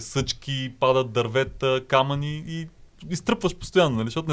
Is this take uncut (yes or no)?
yes